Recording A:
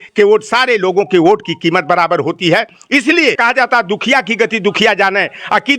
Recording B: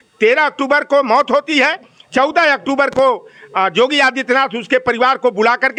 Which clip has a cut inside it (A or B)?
A